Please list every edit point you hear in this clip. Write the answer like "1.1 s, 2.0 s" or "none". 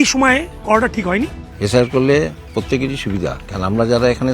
none